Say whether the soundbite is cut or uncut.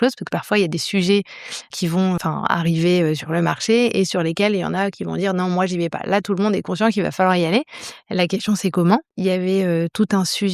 cut